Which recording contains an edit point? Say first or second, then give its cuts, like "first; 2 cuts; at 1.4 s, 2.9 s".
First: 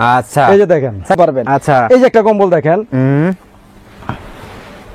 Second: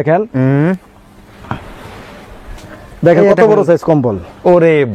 first; 1 cut; at 1.2 s